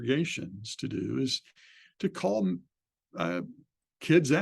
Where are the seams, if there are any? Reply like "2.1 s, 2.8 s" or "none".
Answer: none